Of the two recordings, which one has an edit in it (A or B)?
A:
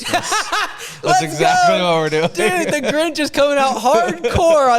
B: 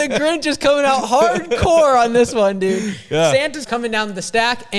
B